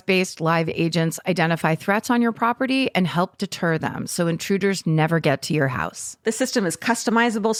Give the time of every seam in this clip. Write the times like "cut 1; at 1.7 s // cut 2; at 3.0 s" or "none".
none